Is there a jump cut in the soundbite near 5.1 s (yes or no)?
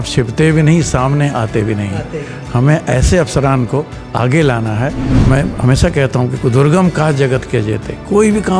yes